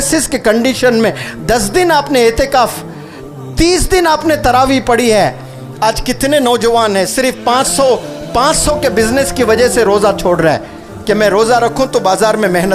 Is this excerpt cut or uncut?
uncut